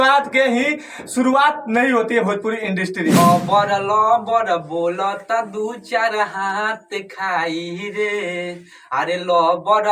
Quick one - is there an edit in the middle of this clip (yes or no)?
yes